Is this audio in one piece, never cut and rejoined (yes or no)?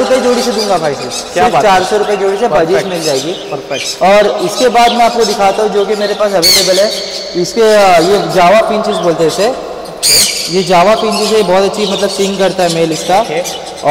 yes